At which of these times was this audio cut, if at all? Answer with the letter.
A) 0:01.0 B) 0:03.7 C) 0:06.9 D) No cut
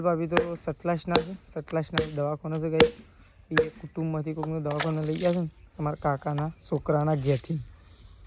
D